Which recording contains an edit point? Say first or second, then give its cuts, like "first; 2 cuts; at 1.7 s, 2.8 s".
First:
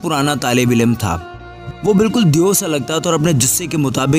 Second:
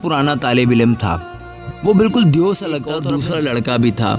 second; 1 cut; at 3.0 s